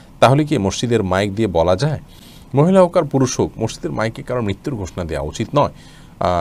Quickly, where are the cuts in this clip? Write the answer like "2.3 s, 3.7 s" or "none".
none